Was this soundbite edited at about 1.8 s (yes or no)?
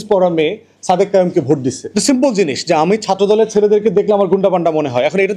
yes